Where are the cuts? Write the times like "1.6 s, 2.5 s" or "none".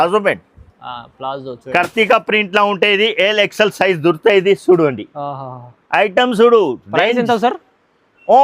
1.6 s